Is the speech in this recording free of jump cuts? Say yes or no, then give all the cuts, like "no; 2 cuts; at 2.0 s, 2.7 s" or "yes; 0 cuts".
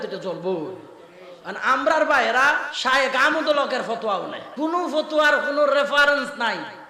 no; 2 cuts; at 2.7 s, 4.4 s